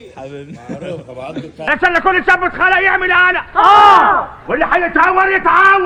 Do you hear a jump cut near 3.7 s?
no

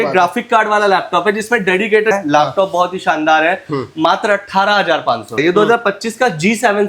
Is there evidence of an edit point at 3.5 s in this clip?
no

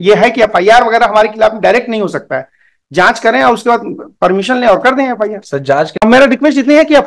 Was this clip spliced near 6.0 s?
yes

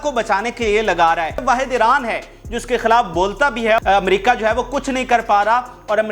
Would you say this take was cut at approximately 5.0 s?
no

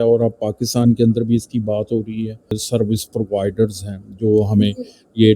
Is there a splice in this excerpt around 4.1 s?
no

